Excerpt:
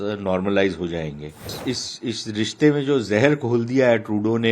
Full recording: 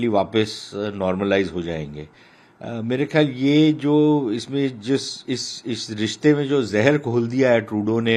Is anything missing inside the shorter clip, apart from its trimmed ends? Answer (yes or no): yes